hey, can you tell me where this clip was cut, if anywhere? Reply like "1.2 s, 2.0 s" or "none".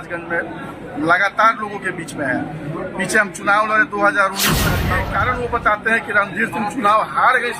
4.9 s

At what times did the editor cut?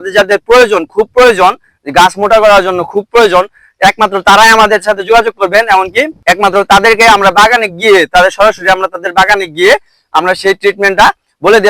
none

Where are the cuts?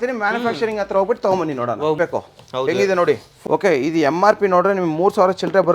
2.0 s, 3.3 s

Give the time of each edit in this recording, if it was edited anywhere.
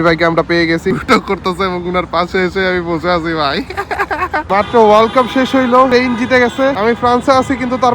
0.9 s, 4.4 s, 5.9 s, 6.8 s

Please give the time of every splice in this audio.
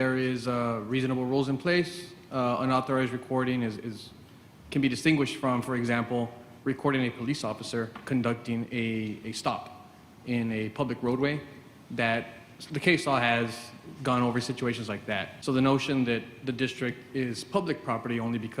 15.3 s

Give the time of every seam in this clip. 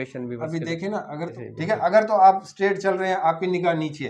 1.4 s

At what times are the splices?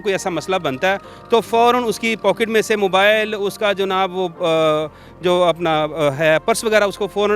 none

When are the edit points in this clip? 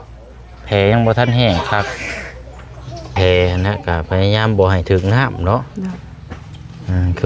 3.1 s

